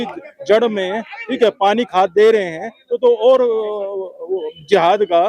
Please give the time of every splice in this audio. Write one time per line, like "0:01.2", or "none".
none